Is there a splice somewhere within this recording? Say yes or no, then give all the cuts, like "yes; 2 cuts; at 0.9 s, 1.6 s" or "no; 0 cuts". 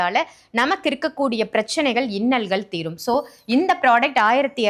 no; 0 cuts